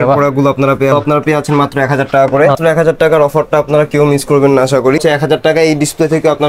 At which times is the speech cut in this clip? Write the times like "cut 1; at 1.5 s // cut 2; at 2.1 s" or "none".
cut 1; at 0.9 s // cut 2; at 2.6 s // cut 3; at 5.0 s